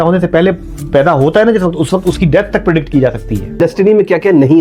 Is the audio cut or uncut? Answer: cut